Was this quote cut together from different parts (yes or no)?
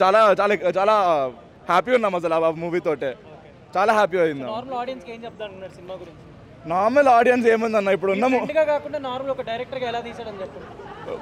no